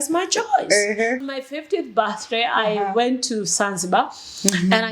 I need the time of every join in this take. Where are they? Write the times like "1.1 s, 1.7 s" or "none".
1.2 s